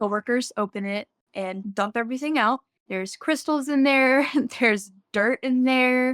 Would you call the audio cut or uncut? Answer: cut